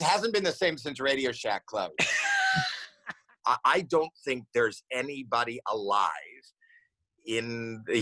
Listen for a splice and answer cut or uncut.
cut